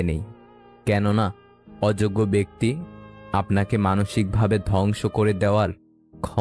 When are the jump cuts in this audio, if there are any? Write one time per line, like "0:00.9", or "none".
none